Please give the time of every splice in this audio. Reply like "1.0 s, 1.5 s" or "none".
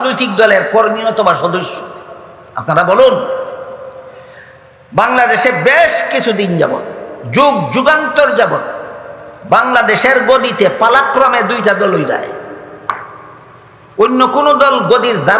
none

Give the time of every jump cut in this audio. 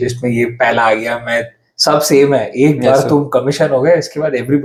none

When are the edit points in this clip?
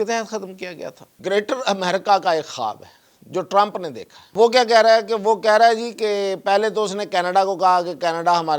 1.1 s, 4.3 s

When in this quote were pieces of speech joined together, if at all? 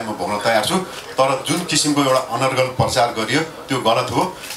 none

